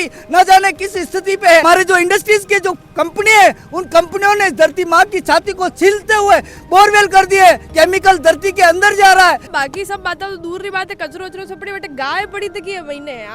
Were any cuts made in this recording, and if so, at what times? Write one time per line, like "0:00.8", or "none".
0:01.6
0:09.5